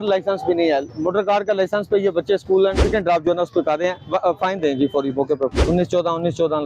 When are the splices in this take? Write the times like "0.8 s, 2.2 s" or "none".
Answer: 2.8 s, 5.6 s